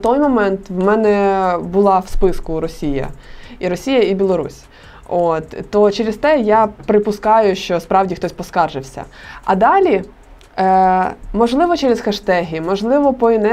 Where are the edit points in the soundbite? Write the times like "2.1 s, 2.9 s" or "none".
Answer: none